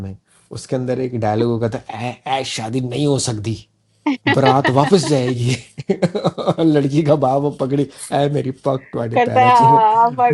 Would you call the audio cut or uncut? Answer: uncut